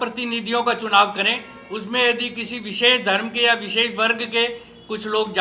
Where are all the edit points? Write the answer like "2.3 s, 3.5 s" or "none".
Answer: none